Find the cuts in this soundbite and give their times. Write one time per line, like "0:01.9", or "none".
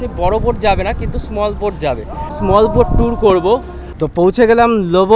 0:02.4
0:03.8